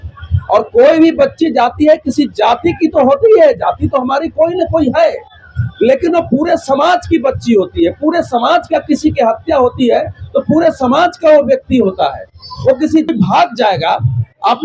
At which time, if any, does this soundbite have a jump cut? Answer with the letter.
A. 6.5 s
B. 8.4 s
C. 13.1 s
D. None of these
C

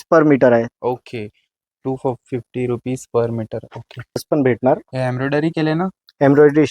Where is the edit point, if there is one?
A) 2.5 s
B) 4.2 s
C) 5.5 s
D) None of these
B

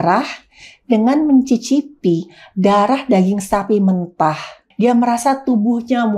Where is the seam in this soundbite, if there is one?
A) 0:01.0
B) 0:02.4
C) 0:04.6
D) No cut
C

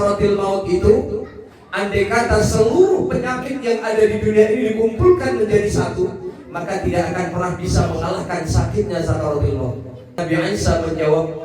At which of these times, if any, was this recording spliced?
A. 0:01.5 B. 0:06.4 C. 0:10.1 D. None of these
C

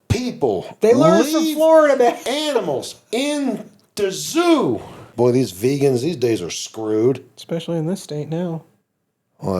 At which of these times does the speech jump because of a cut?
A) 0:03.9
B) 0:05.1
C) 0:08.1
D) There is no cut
B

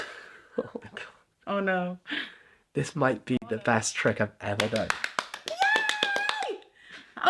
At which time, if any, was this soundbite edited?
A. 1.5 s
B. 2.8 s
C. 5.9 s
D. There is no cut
D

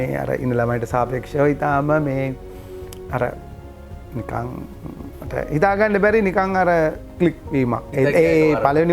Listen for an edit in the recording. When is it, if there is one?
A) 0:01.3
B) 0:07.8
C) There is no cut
B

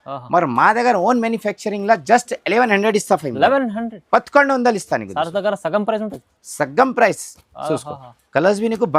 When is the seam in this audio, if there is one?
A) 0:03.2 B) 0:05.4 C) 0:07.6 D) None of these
D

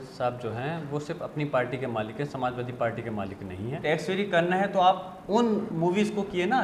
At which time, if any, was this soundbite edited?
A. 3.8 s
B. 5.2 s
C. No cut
A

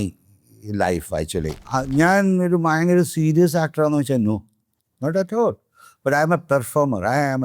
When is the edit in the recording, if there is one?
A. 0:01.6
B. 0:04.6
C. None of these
A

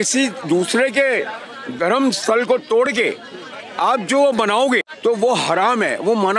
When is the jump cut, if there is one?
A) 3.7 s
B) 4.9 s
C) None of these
B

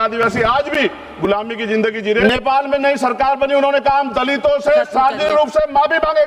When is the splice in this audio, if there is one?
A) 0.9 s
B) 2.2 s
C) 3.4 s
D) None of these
B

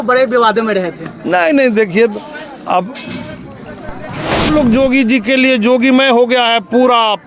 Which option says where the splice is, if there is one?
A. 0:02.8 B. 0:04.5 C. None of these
B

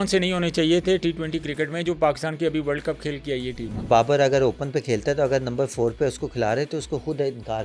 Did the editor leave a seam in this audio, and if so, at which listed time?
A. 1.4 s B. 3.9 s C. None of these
B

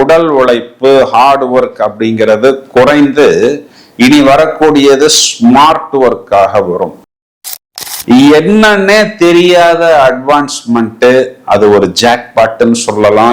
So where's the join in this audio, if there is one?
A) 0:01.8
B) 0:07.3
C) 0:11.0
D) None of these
B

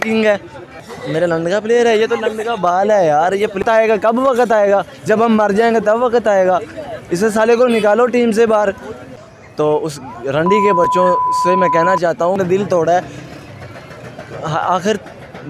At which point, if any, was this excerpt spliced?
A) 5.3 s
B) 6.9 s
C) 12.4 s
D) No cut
C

